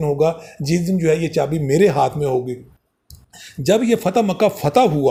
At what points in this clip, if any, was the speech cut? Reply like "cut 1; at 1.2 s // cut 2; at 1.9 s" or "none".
none